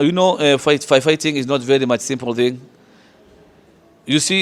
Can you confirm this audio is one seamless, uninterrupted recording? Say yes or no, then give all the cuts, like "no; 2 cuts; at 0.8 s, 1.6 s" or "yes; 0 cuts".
yes; 0 cuts